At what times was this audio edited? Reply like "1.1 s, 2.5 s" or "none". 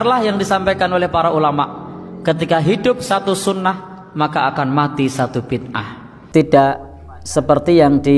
6.1 s